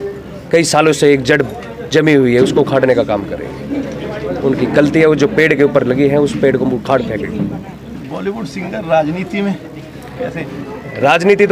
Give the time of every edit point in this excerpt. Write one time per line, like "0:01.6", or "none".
none